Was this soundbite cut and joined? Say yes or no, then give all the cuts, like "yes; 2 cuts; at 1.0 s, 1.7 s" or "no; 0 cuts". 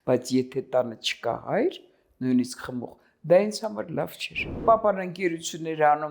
yes; 1 cut; at 4.5 s